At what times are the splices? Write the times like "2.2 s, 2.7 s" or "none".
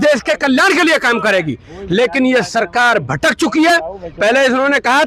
none